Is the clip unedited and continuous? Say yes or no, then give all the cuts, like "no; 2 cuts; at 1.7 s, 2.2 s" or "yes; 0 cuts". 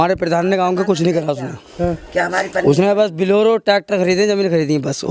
yes; 0 cuts